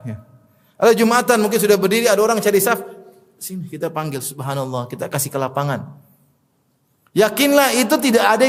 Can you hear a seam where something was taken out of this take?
no; 0 cuts

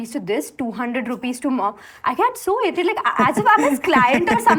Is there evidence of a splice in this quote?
no; 0 cuts

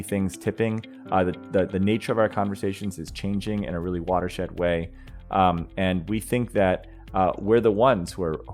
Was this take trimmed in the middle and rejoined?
no; 0 cuts

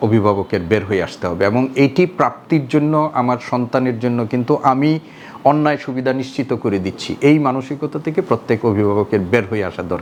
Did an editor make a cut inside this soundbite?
no; 0 cuts

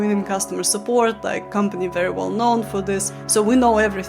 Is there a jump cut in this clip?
yes; 1 cut; at 3.1 s

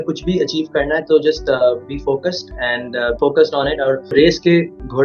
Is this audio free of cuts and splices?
no; 2 cuts; at 3.2 s, 4.1 s

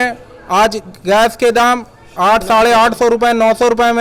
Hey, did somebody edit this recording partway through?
no; 0 cuts

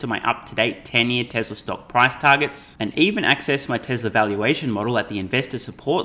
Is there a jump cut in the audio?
no; 0 cuts

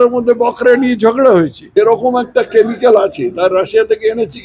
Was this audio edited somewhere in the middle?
yes; 1 cut; at 1.8 s

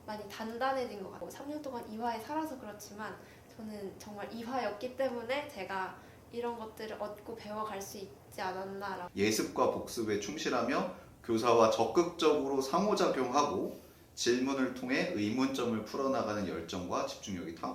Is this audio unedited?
no; 2 cuts; at 1.2 s, 9.0 s

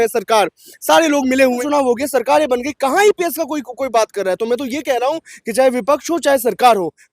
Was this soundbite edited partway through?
yes; 1 cut; at 1.6 s

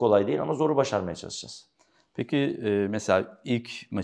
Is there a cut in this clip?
no; 0 cuts

